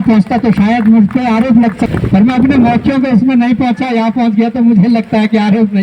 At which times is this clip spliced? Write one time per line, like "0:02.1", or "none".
0:01.9